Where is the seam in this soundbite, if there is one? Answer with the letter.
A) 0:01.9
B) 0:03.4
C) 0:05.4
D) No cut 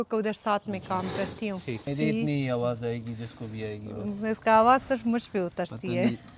A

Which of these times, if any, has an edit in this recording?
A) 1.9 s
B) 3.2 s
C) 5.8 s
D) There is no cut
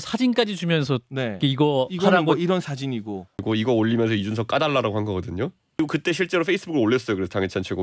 C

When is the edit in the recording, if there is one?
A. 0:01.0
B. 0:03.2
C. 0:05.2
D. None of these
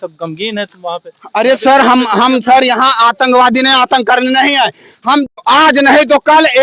C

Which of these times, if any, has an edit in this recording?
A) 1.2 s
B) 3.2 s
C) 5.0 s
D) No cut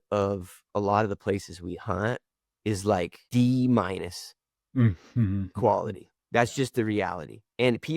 B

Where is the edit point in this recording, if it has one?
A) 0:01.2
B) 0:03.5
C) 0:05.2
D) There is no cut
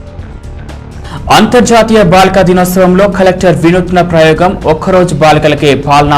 A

